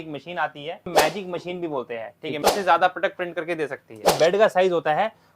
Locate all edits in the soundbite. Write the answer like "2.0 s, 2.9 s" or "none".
0.9 s, 2.4 s, 4.1 s